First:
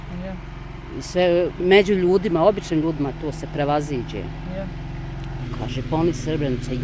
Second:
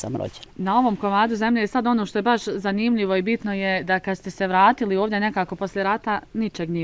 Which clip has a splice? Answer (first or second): first